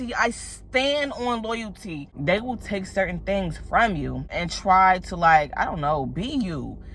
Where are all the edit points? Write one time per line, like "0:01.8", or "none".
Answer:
0:02.1
0:04.5